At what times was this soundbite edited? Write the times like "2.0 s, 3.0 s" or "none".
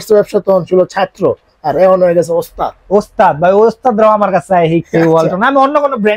none